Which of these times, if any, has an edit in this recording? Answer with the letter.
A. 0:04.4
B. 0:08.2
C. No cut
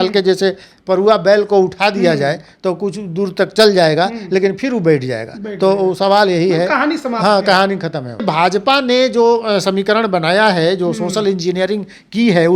B